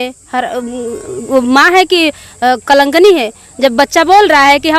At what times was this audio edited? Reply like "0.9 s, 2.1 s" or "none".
none